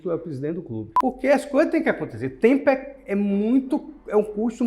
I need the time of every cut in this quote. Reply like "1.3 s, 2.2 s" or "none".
0.9 s